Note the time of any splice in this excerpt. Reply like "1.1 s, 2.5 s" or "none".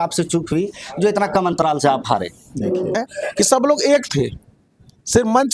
2.9 s